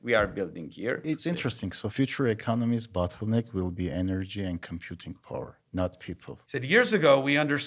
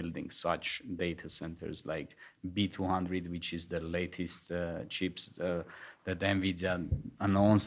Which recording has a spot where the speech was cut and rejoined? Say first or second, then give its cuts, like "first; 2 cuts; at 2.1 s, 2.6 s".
first; 2 cuts; at 1.4 s, 6.3 s